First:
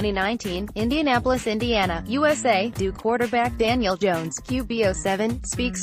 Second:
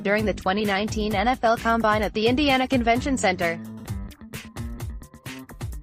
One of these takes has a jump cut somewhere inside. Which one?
second; 1 cut; at 3.6 s

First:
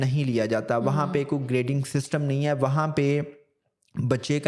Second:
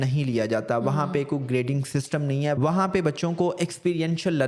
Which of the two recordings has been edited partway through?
second; 1 cut; at 2.6 s

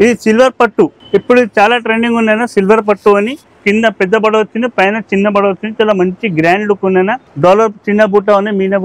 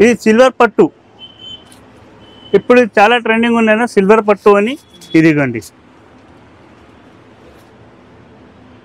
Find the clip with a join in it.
first; 3 cuts; at 1.0 s, 3.5 s, 7.2 s

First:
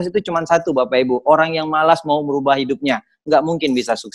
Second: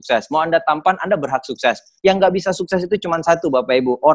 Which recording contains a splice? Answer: second; 1 cut; at 1.8 s

